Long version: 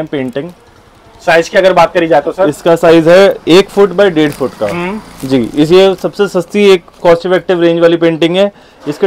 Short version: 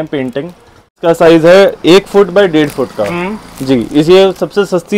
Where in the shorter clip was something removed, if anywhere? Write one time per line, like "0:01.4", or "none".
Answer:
0:01.0